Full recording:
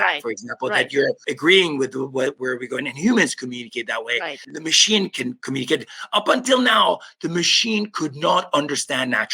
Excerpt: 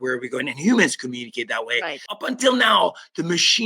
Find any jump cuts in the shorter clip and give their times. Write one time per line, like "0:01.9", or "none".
0:02.3